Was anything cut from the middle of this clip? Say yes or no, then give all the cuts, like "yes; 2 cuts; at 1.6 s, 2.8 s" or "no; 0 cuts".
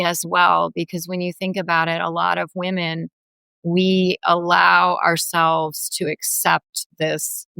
no; 0 cuts